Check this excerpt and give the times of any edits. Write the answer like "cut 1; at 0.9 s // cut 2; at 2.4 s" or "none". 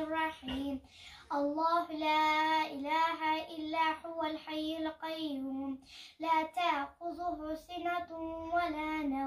none

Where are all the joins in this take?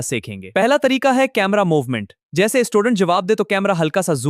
none

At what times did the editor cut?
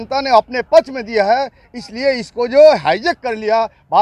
none

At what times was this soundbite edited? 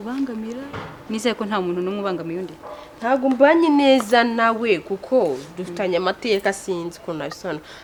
none

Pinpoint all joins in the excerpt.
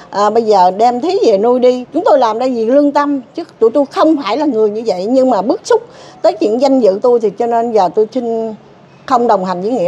cut 1; at 2.1 s

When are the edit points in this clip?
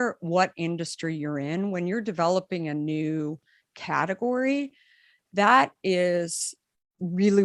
none

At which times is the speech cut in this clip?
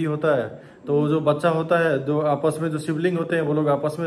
none

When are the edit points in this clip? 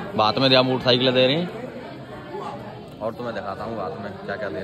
none

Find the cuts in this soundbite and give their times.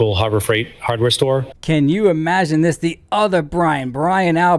cut 1; at 1.5 s

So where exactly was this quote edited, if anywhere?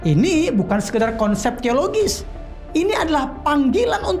none

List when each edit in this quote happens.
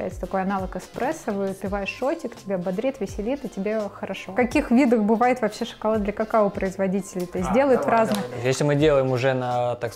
cut 1; at 4.2 s // cut 2; at 8.2 s

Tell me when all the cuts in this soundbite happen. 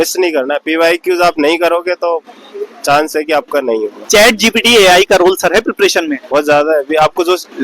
cut 1; at 4.0 s

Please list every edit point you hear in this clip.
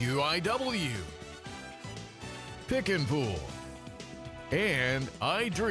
cut 1; at 1.0 s

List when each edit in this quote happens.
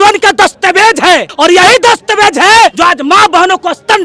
cut 1; at 1.3 s // cut 2; at 2.8 s

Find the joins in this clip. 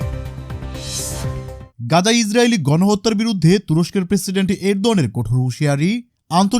cut 1; at 1.7 s

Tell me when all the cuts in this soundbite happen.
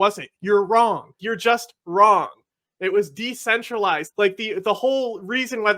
cut 1; at 1.3 s // cut 2; at 4.1 s

